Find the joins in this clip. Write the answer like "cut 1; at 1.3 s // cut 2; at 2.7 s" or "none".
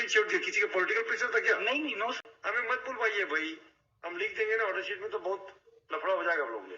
cut 1; at 2.2 s